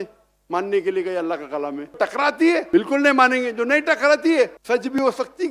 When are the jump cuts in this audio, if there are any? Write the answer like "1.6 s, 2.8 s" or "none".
2.0 s, 2.7 s, 4.6 s